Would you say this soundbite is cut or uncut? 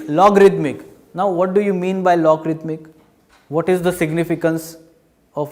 uncut